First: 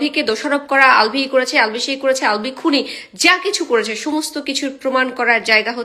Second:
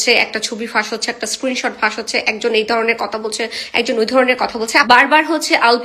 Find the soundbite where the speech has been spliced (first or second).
second